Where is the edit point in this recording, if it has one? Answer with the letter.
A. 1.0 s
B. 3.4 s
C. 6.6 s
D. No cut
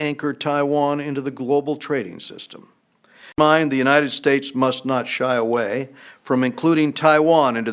B